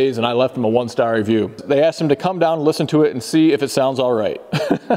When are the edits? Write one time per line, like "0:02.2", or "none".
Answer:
0:01.6